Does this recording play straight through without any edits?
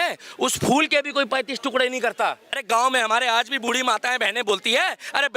no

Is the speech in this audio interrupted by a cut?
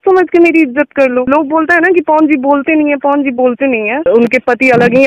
yes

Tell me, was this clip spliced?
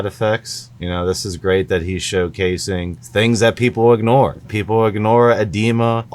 no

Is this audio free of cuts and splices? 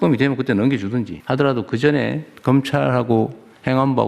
no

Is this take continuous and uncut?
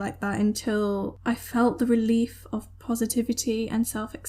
no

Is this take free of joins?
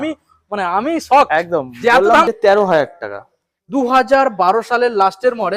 no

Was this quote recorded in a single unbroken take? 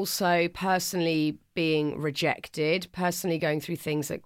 yes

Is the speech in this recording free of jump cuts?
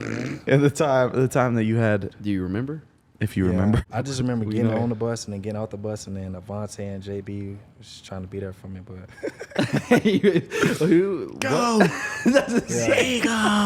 no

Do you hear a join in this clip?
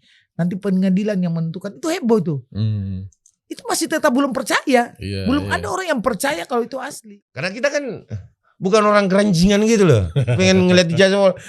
yes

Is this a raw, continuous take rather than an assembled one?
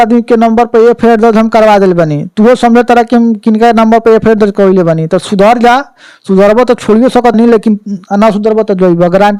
yes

